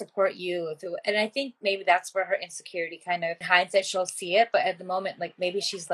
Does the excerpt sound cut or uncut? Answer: cut